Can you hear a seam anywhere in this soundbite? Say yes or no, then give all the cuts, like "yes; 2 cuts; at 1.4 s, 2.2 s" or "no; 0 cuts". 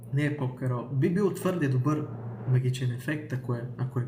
no; 0 cuts